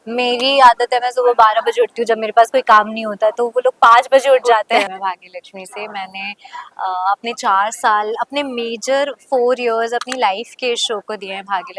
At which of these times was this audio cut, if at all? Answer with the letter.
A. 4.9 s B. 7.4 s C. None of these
A